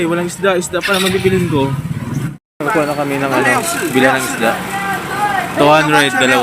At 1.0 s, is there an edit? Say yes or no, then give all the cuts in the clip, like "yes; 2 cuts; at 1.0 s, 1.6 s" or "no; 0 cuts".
no; 1 cut; at 2.3 s